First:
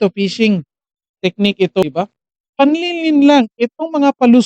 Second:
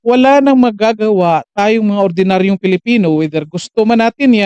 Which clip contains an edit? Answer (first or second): first